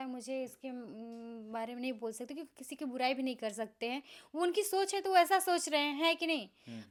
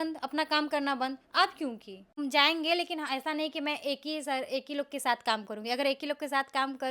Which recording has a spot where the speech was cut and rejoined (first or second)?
second